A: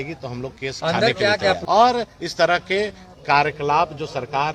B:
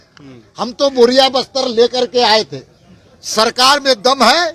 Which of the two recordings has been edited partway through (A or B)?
A